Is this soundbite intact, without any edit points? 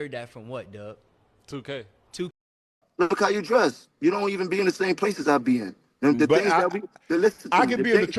no; 1 cut; at 2.8 s

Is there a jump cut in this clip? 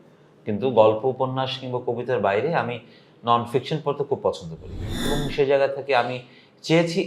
yes; 1 cut; at 5.1 s

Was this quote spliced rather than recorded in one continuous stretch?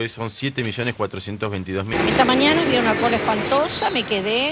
yes; 1 cut; at 1.9 s

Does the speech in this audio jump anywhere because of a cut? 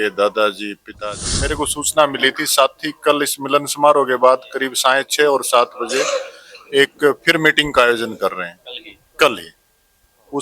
yes; 1 cut; at 1.0 s

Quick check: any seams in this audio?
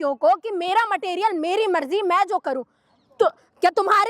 no; 0 cuts

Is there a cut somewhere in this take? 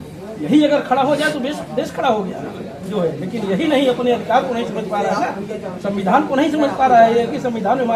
no; 0 cuts

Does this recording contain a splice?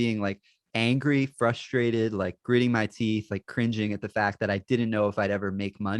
no; 0 cuts

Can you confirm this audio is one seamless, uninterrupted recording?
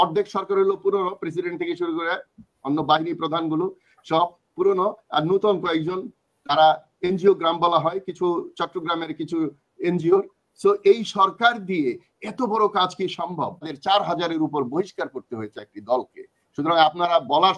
no; 1 cut; at 13.7 s

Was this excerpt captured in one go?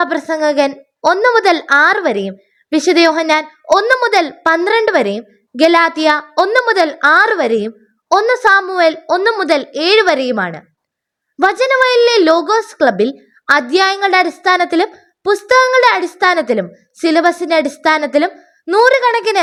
yes; 0 cuts

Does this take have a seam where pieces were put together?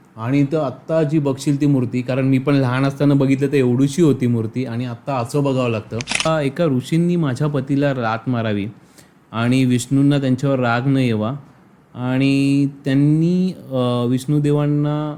yes; 1 cut; at 6.3 s

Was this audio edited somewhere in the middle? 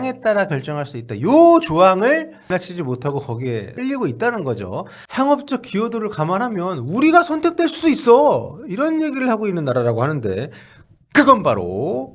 yes; 2 cuts; at 2.5 s, 3.7 s

